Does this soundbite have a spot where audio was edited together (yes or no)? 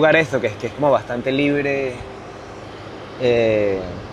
no